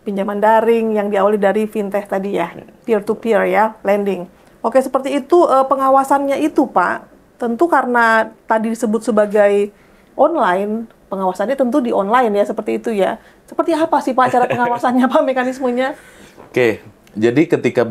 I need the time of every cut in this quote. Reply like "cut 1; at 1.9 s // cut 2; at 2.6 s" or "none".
none